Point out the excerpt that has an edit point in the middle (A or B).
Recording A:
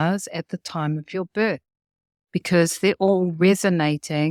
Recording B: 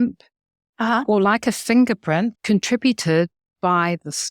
B